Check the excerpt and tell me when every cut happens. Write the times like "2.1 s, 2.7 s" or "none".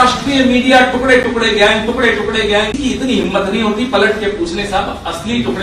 2.8 s